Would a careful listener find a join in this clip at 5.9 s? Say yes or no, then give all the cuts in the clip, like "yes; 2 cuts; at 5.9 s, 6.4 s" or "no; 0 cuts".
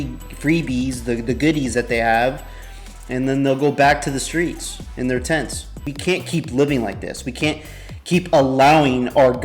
yes; 1 cut; at 5.9 s